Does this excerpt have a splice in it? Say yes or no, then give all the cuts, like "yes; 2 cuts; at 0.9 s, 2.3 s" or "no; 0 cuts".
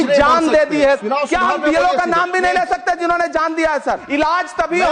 yes; 2 cuts; at 1.0 s, 4.0 s